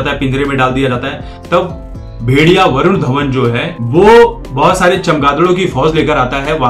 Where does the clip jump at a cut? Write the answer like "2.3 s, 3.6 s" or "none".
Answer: 3.7 s, 4.4 s